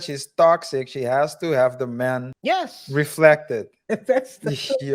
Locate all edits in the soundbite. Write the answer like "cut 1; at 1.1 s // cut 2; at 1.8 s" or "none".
cut 1; at 2.3 s // cut 2; at 3.7 s